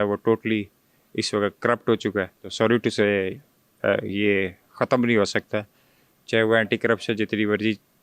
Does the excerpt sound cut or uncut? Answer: uncut